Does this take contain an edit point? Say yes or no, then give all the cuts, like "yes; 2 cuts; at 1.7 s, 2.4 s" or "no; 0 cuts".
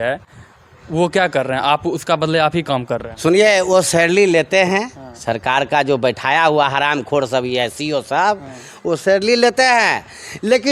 no; 0 cuts